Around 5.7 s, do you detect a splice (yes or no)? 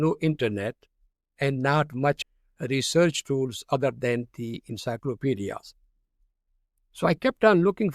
no